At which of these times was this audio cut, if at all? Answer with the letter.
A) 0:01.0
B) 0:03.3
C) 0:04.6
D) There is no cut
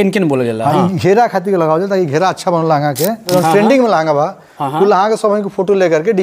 B